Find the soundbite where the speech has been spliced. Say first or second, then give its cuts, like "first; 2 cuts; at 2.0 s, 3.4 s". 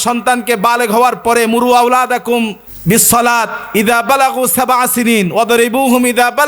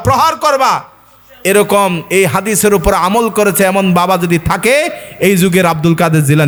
first; 1 cut; at 2.7 s